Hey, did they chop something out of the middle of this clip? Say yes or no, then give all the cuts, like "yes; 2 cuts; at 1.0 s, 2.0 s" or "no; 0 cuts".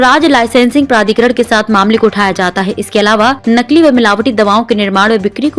yes; 1 cut; at 3.4 s